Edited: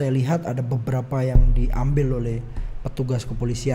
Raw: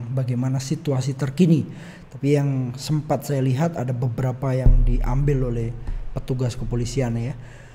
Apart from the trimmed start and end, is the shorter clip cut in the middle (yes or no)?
no